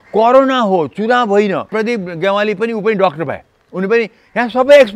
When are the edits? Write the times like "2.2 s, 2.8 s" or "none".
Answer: 1.7 s